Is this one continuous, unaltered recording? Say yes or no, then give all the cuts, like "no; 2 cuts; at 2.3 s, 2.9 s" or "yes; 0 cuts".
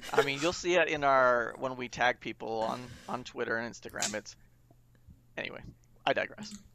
yes; 0 cuts